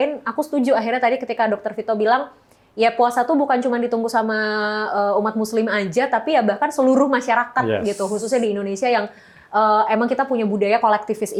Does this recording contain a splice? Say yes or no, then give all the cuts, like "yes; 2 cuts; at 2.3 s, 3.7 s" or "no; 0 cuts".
no; 0 cuts